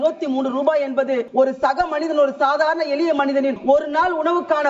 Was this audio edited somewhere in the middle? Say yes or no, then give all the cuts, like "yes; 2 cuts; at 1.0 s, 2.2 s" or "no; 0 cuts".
yes; 2 cuts; at 1.3 s, 3.6 s